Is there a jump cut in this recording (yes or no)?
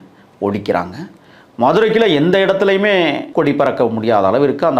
yes